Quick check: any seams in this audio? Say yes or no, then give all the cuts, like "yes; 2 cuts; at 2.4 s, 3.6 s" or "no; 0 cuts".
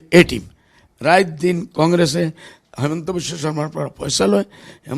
no; 0 cuts